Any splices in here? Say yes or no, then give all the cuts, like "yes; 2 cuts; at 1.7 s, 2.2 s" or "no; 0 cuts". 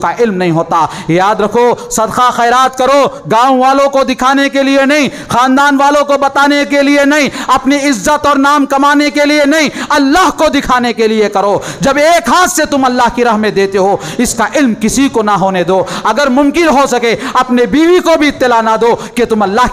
no; 0 cuts